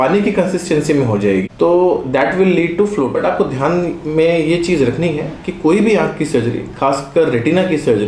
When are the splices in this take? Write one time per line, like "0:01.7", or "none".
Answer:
0:03.1